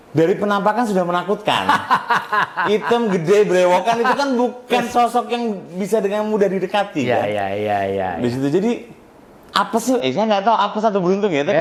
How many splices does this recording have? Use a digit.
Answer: 0